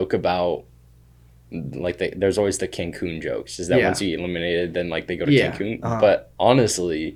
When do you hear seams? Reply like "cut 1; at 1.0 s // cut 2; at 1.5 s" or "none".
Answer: none